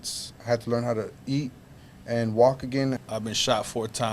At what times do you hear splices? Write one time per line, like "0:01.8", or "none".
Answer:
0:03.0